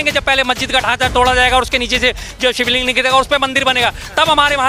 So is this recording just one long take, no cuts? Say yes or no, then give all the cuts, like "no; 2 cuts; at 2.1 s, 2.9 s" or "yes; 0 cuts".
yes; 0 cuts